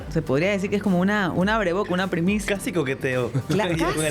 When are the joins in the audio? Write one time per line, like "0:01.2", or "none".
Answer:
0:01.3